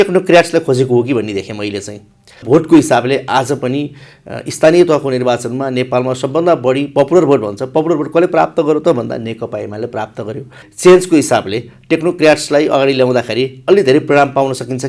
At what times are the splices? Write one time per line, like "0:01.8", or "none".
0:02.4
0:10.6